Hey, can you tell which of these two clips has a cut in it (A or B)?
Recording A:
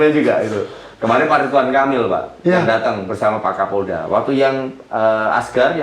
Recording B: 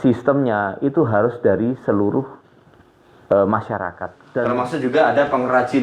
B